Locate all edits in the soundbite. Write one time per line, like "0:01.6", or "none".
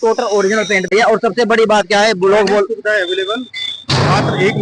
0:00.9